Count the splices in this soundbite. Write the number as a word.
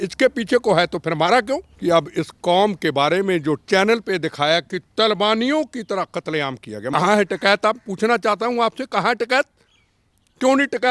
two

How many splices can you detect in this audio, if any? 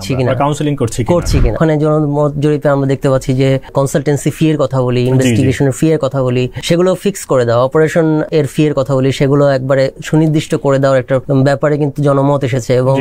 five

